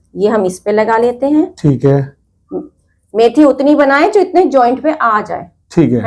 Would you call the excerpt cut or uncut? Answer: uncut